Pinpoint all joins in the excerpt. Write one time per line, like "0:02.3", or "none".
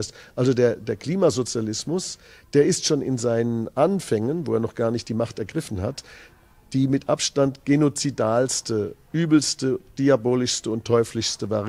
none